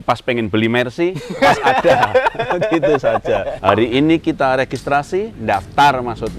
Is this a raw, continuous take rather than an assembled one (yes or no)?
no